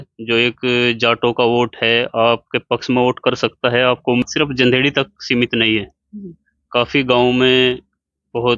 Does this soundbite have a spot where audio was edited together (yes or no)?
yes